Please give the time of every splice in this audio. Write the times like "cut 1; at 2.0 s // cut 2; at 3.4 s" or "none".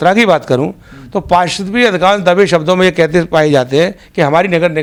none